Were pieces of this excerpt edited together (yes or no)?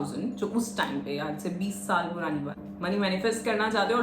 yes